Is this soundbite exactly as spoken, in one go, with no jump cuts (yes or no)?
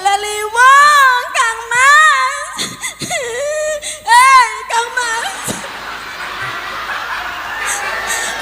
yes